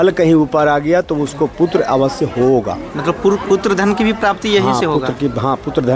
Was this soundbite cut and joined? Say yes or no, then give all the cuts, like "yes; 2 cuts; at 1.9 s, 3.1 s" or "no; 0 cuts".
no; 0 cuts